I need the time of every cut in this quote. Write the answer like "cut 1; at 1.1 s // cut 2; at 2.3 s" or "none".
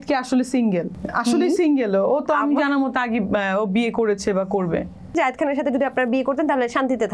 cut 1; at 1.0 s // cut 2; at 5.1 s